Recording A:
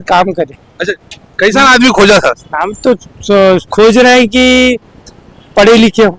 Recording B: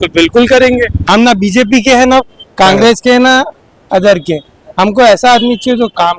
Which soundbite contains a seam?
B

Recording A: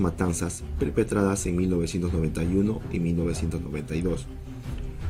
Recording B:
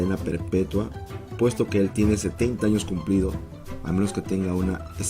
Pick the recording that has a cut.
B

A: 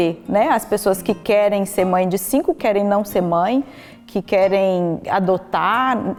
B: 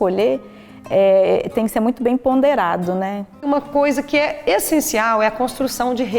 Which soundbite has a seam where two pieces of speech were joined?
B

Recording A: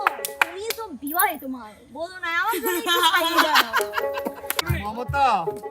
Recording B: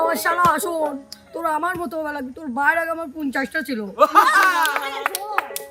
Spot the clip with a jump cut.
A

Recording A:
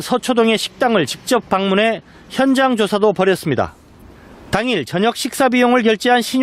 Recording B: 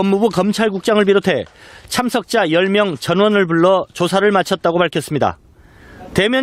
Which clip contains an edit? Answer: A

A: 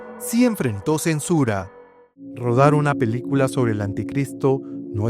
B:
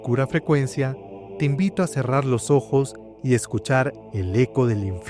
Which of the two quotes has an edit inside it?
A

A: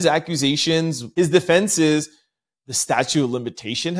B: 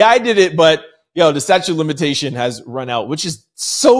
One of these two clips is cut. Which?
A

